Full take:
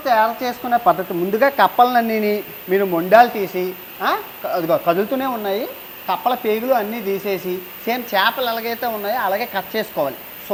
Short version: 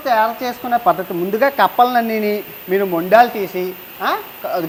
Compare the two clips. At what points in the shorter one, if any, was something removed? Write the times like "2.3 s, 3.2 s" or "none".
none